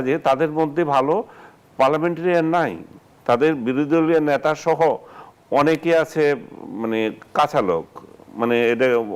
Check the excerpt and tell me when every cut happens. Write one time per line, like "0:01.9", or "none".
none